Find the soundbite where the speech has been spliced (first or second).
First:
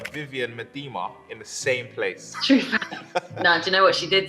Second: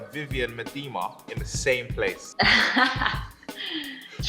first